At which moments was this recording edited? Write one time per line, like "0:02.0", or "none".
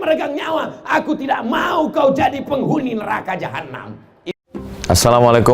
0:04.2